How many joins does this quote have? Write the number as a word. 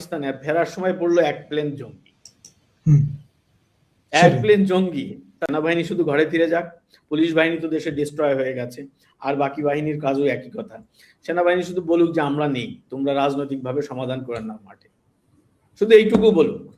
one